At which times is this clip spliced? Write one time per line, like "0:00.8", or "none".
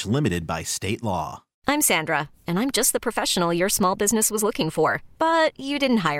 0:01.5